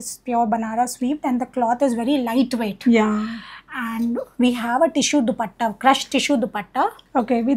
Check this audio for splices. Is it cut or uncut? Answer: uncut